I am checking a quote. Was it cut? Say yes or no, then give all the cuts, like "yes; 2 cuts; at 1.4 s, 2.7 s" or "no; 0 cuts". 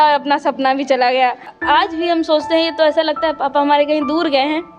yes; 1 cut; at 1.5 s